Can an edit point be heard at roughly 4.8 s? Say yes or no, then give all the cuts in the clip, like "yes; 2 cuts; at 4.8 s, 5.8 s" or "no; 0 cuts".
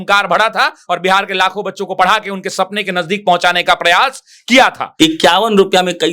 yes; 1 cut; at 4.8 s